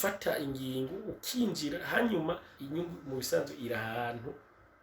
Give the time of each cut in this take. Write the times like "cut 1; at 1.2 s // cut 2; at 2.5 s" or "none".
cut 1; at 2.5 s